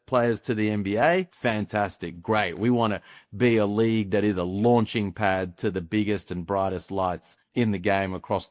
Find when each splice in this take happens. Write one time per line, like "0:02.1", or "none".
0:01.0
0:07.3